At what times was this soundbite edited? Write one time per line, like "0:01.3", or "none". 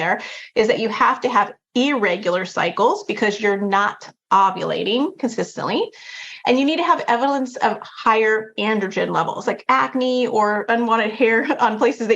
0:09.4
0:10.6